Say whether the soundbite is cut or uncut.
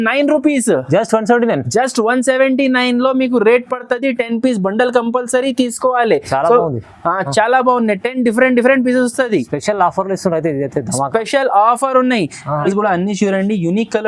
cut